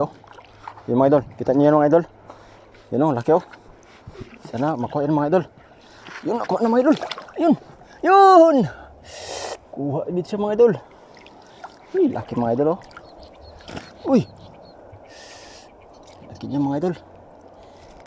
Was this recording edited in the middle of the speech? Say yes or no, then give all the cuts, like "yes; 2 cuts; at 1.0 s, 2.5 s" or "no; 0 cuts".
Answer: no; 0 cuts